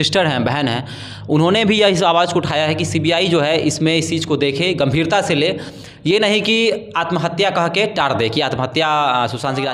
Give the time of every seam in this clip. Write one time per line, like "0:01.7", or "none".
none